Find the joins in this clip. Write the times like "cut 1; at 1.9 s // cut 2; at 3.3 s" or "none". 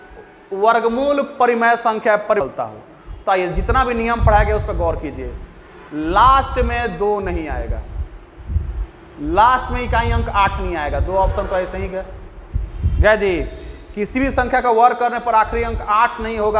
cut 1; at 2.4 s